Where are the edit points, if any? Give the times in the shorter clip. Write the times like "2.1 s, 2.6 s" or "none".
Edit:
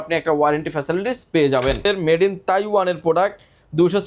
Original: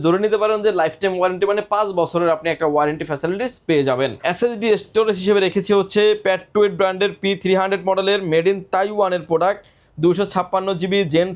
1.8 s